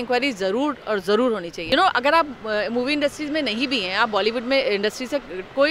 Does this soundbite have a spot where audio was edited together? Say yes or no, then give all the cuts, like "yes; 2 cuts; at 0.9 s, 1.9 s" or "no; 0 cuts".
yes; 1 cut; at 1.6 s